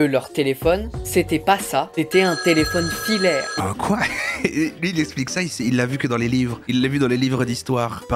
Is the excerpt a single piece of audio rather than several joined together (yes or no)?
no